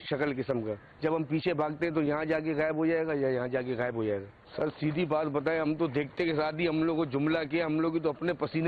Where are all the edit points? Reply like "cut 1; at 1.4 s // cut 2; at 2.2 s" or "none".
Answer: cut 1; at 4.4 s

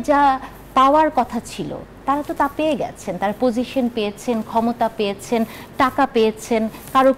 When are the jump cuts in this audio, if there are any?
none

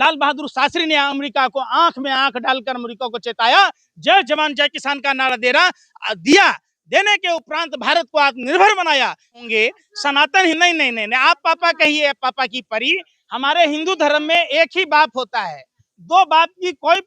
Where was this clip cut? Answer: cut 1; at 9.4 s

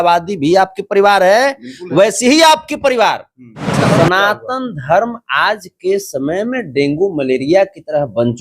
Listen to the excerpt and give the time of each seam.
cut 1; at 3.7 s

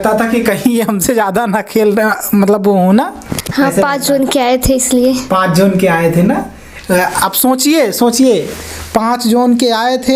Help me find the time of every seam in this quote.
none

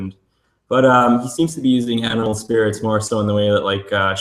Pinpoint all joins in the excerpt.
cut 1; at 1.1 s

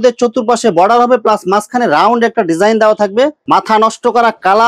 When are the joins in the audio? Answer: cut 1; at 3.4 s

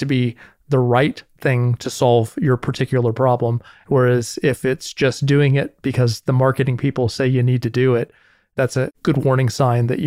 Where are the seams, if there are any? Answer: cut 1; at 3.7 s

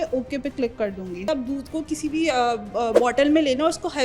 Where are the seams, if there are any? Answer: cut 1; at 1.3 s

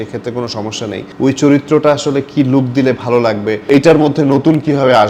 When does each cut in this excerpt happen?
cut 1; at 1.1 s // cut 2; at 3.6 s

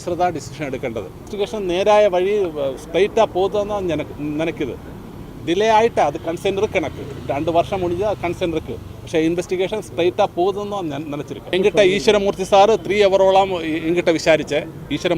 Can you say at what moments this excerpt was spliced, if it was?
cut 1; at 1.3 s // cut 2; at 11.5 s

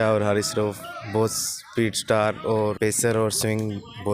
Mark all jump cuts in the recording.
cut 1; at 2.8 s

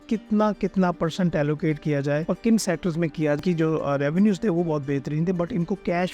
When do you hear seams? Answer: cut 1; at 2.2 s // cut 2; at 3.4 s

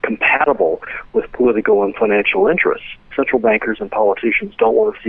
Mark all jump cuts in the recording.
cut 1; at 3.0 s

